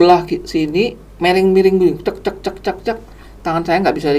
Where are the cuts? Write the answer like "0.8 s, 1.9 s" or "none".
1.0 s